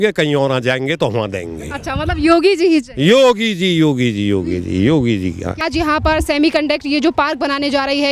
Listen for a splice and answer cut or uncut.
uncut